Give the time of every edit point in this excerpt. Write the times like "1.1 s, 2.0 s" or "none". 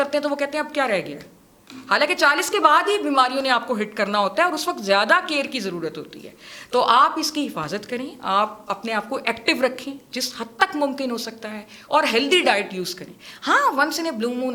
none